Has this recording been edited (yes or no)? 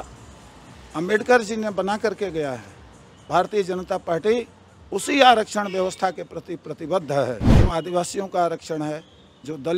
yes